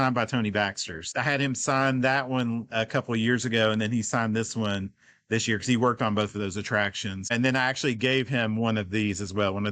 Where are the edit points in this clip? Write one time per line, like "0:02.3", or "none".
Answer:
0:01.0
0:07.3